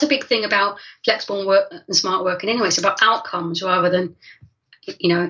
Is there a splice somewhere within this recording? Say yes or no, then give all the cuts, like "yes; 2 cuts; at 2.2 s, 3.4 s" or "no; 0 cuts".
no; 0 cuts